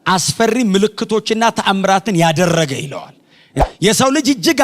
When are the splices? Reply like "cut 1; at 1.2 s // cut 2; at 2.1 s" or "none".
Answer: cut 1; at 3.6 s